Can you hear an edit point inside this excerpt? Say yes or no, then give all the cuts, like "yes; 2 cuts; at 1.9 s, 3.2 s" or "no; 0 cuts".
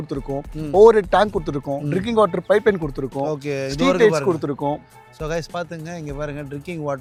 no; 0 cuts